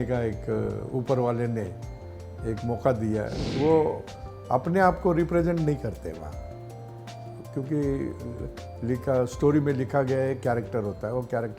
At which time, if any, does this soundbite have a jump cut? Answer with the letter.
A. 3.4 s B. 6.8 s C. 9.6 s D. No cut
A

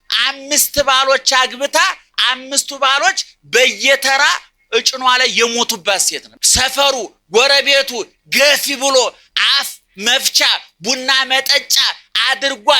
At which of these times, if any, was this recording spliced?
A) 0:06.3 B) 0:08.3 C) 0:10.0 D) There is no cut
A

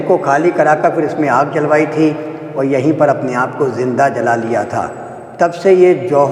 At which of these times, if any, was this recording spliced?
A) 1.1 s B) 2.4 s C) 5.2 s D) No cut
D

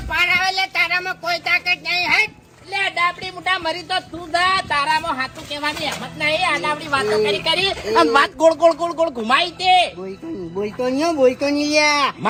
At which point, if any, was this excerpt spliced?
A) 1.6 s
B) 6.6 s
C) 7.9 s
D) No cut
D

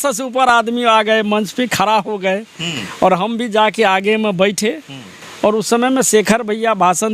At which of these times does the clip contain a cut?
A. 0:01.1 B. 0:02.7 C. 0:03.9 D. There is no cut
D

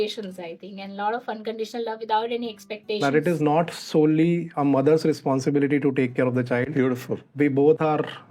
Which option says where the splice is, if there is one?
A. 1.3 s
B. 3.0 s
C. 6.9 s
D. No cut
B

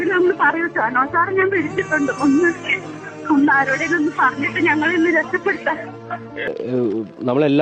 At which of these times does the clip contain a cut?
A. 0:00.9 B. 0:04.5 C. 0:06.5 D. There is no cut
C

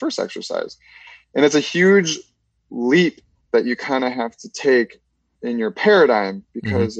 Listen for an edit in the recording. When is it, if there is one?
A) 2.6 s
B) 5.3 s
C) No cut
B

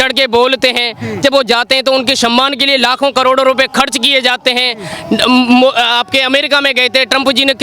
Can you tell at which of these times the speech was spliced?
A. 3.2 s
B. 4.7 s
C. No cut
C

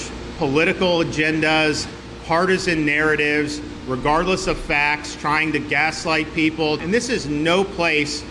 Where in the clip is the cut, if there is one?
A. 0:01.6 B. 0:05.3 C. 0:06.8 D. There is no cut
C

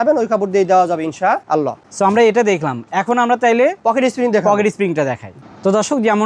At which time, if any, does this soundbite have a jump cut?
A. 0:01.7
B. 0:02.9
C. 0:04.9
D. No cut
D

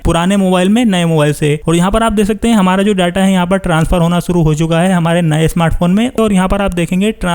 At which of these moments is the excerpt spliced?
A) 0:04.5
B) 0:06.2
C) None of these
B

